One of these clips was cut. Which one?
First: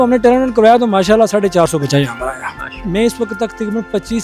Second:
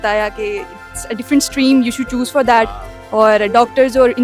first; 1 cut; at 2.8 s

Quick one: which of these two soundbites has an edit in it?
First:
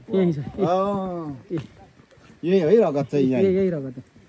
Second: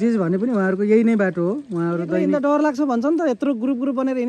second; 1 cut; at 2.3 s

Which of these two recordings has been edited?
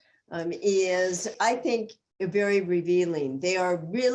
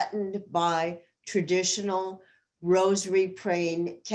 first; 1 cut; at 1.3 s

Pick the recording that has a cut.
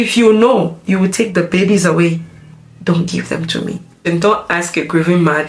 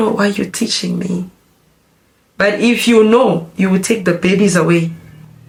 first; 1 cut; at 4.0 s

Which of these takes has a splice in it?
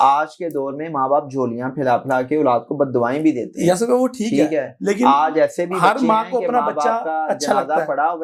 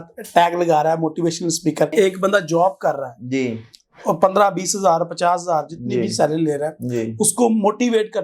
second; 1 cut; at 1.9 s

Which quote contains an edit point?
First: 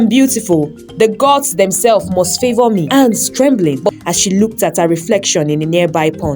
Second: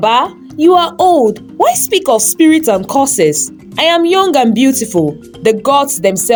first; 1 cut; at 2.9 s

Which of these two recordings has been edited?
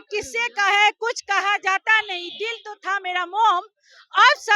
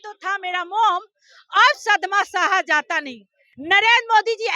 second; 1 cut; at 3.5 s

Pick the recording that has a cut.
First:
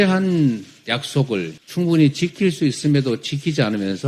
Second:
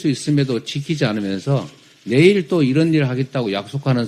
first; 1 cut; at 1.6 s

